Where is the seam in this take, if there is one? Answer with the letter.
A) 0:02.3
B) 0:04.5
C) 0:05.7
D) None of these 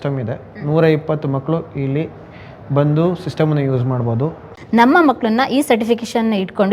B